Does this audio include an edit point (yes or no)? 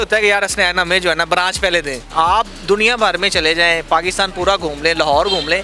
yes